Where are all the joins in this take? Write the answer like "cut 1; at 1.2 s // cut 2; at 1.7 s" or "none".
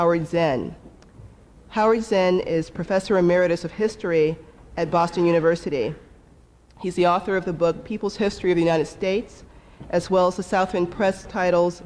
cut 1; at 8.9 s